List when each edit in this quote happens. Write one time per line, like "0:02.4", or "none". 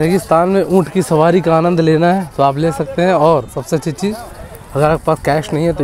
none